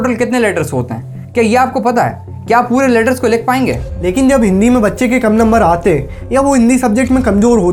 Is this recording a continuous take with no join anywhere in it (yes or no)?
yes